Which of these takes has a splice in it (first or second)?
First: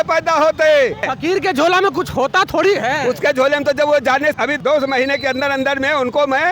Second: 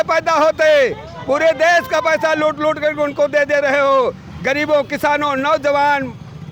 first